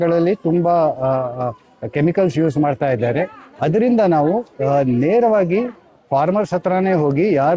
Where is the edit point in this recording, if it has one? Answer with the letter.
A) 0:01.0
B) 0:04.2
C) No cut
C